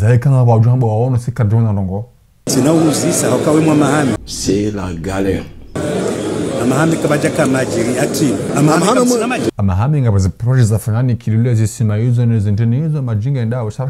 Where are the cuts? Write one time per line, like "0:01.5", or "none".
0:09.6

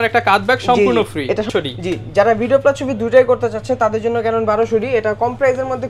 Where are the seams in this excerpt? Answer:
0:01.5

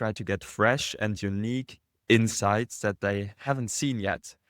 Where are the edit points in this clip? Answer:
0:03.5

